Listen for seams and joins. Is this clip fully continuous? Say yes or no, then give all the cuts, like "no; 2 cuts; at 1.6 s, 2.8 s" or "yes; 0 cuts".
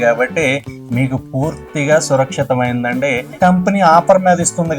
no; 1 cut; at 3.4 s